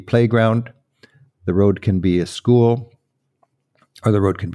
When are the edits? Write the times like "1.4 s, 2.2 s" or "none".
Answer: none